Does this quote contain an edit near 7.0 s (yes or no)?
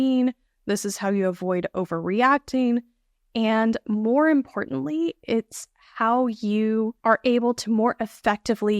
yes